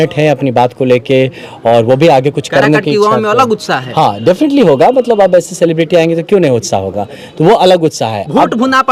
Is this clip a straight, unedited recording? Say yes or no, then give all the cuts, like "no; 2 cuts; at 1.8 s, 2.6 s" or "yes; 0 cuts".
yes; 0 cuts